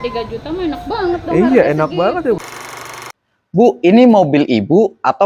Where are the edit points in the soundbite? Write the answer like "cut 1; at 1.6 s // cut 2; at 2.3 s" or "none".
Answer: cut 1; at 2.9 s